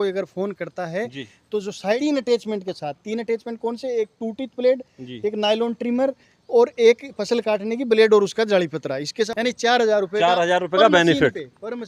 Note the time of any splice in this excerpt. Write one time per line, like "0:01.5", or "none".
0:02.0
0:09.3